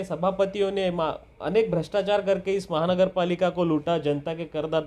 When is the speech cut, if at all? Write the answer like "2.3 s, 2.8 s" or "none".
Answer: none